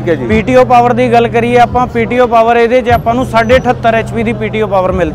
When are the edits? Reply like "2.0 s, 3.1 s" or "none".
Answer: none